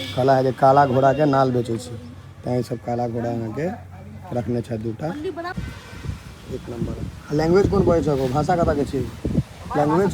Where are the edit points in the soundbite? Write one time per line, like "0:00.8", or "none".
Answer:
0:05.5